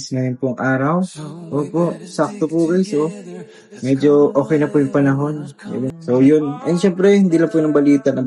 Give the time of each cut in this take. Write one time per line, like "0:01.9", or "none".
0:05.9